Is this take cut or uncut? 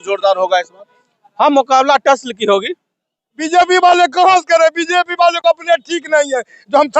cut